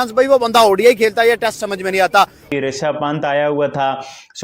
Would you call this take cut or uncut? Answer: cut